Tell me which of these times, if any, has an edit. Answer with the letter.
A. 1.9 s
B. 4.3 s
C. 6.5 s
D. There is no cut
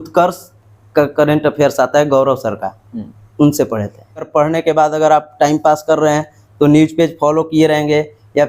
B